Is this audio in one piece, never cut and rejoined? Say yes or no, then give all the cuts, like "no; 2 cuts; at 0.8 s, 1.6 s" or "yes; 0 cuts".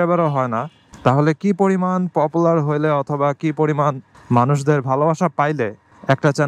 yes; 0 cuts